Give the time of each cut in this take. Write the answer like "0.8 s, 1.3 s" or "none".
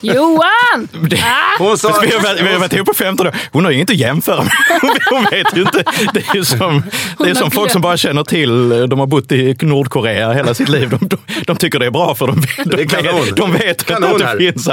none

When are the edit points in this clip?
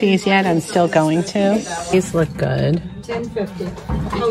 1.9 s

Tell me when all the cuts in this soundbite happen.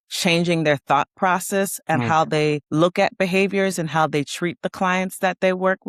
none

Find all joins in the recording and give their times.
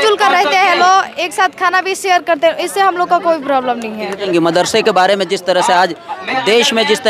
4.3 s

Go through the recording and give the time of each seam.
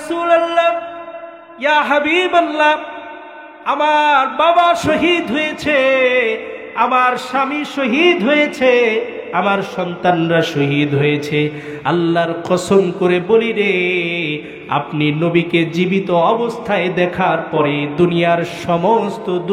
none

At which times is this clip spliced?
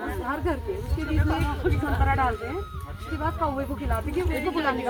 none

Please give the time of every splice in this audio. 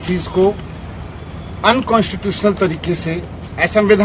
none

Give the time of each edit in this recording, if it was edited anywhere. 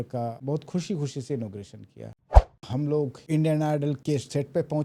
2.2 s

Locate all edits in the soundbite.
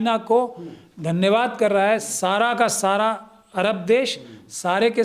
none

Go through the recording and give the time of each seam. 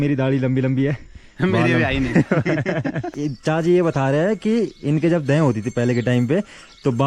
3.1 s

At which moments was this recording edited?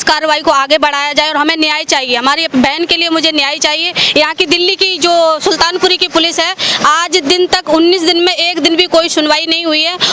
none

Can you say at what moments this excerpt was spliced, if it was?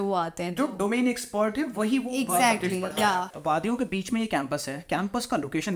3.3 s

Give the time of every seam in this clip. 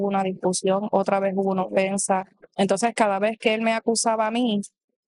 2.4 s

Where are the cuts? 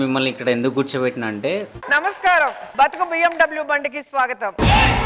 none

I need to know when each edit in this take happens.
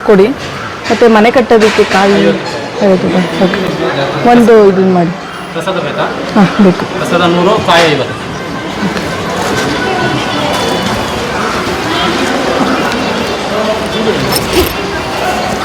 none

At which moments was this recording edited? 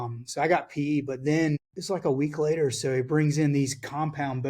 1.7 s

